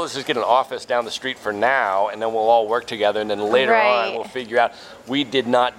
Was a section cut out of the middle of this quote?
no; 0 cuts

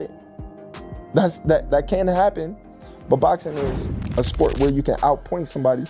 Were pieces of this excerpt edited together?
no; 0 cuts

